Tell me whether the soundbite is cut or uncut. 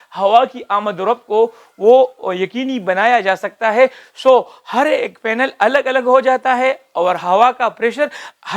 uncut